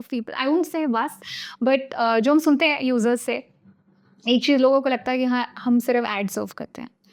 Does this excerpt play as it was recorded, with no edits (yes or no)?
yes